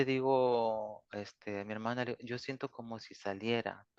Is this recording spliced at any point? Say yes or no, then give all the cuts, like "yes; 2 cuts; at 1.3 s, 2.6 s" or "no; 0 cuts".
no; 0 cuts